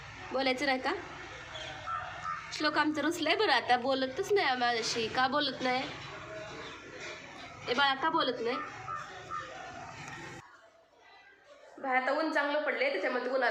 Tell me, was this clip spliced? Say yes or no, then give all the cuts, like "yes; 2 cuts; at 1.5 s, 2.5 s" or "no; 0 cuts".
no; 0 cuts